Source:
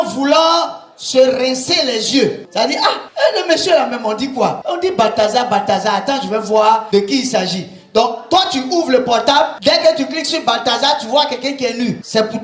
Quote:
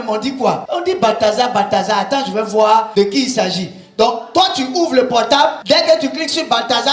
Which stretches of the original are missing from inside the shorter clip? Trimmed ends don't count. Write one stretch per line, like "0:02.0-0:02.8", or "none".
none